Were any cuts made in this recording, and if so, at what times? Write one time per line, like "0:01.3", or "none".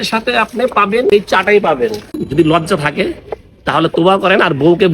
0:01.1
0:02.2